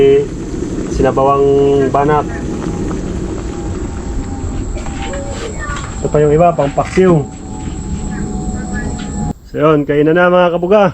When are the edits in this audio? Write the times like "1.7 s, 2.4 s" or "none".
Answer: 9.3 s